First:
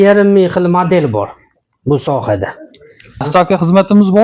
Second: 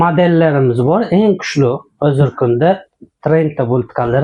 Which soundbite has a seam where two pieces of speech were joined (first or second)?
first